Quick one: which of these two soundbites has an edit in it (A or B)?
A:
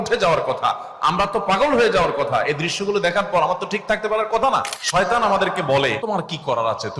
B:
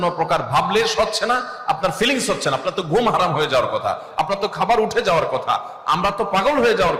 A